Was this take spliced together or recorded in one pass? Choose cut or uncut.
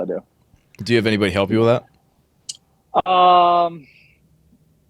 uncut